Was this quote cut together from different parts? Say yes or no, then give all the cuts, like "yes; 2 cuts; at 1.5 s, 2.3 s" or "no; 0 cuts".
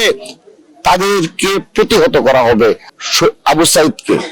yes; 1 cut; at 2.9 s